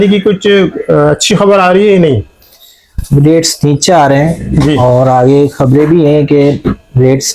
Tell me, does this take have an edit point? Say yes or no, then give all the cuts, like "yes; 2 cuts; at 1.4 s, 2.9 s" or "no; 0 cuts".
no; 0 cuts